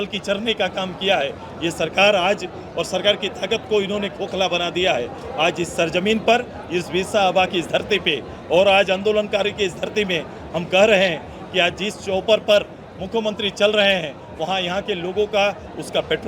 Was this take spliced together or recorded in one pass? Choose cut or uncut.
uncut